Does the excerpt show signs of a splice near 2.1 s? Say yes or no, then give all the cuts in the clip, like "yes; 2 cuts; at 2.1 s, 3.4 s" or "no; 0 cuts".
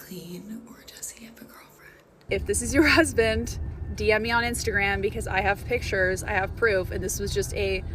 yes; 1 cut; at 2.1 s